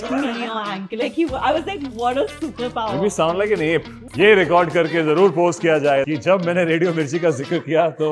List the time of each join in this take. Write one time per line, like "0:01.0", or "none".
0:04.0
0:06.1

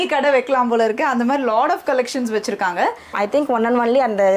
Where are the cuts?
0:03.1

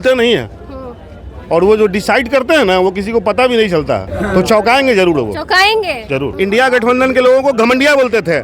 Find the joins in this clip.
0:04.1
0:06.3

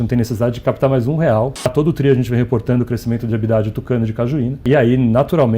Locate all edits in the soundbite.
0:01.7
0:04.6

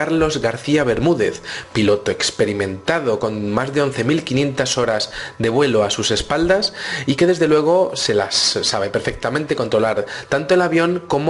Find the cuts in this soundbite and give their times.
0:01.2

